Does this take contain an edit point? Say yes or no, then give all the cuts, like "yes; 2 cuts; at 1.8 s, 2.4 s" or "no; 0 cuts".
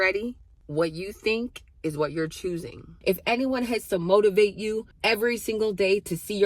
yes; 2 cuts; at 2.9 s, 4.9 s